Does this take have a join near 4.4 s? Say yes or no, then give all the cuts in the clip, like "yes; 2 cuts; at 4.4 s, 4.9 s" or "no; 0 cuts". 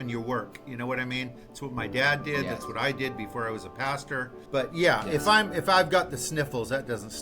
yes; 1 cut; at 4.4 s